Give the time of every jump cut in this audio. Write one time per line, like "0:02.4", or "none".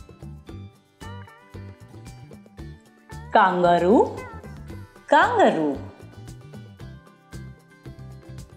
none